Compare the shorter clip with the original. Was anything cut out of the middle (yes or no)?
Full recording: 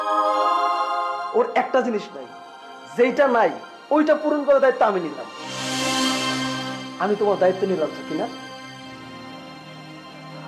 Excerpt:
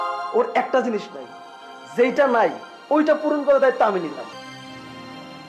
yes